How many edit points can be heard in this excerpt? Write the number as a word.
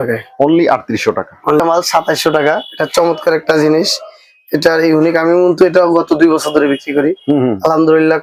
one